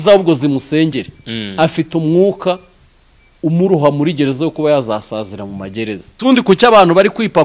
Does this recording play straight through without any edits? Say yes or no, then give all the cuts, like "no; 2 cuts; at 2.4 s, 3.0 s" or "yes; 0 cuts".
no; 1 cut; at 6.1 s